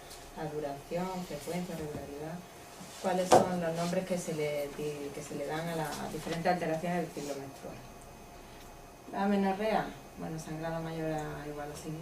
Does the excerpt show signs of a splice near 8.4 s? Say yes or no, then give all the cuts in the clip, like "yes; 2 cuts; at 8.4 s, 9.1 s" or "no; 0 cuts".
no; 1 cut; at 3.7 s